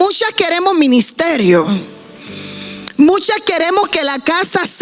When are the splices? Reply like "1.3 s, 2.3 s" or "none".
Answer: none